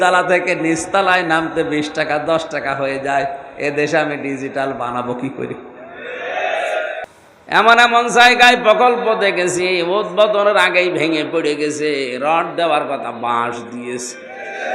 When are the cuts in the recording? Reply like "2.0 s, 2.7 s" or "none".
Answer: 7.0 s